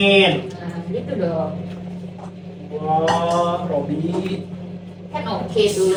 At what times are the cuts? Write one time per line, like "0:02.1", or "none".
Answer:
none